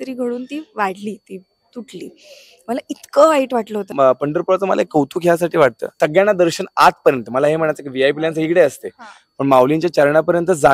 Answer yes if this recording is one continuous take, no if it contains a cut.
no